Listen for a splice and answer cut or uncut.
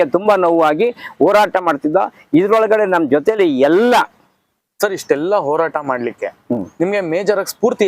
cut